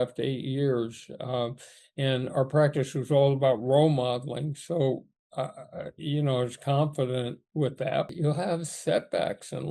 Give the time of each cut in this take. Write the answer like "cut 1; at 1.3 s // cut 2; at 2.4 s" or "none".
cut 1; at 8.1 s